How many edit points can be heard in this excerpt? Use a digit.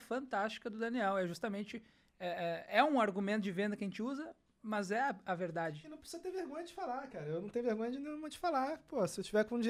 0